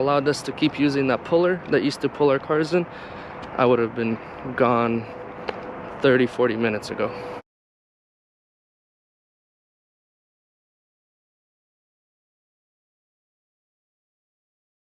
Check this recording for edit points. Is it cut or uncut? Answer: uncut